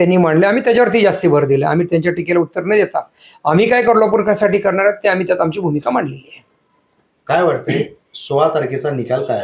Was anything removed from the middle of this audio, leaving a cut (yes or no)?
no